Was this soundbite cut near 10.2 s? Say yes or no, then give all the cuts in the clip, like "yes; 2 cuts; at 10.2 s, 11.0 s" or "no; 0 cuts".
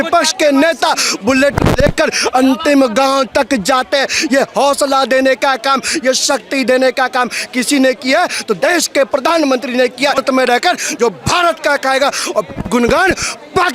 yes; 1 cut; at 10.2 s